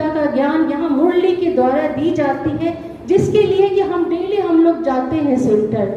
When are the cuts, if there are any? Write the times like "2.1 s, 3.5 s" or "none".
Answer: none